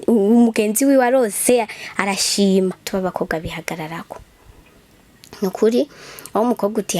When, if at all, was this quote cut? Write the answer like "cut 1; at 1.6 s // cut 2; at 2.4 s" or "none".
cut 1; at 2.8 s